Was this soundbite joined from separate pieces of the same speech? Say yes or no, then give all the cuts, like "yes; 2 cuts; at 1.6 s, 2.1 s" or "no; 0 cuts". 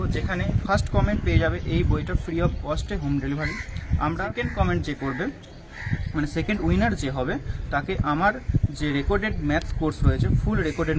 yes; 1 cut; at 4.3 s